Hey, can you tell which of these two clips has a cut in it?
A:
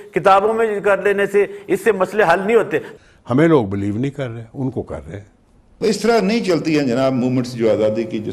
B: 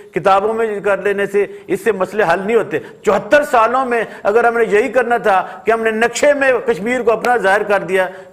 A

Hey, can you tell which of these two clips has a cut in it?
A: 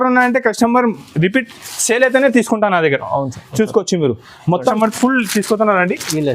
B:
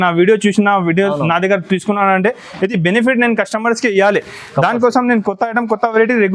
A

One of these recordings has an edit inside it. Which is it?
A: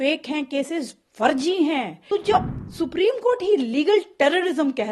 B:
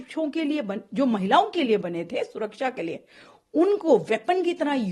A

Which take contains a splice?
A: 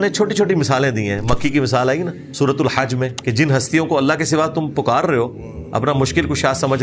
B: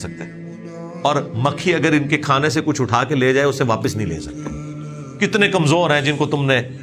A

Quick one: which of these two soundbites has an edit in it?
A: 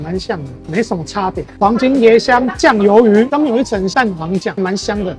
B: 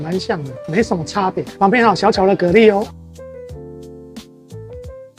A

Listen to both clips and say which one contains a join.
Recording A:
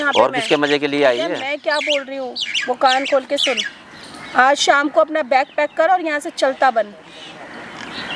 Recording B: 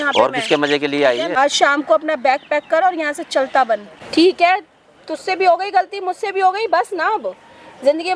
B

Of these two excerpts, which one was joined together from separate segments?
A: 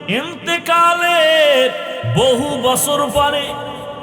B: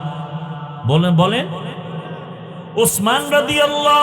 A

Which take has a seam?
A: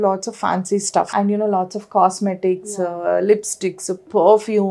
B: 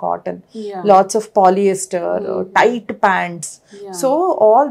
A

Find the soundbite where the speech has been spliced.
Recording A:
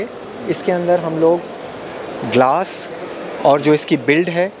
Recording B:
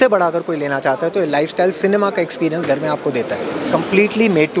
B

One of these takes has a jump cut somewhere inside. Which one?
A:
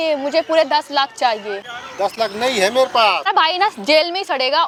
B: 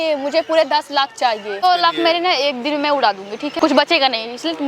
B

